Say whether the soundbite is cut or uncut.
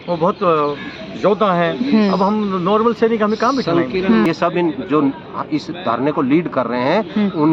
cut